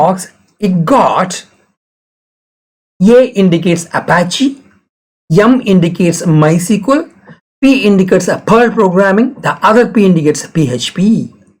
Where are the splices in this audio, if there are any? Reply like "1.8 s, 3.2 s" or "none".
none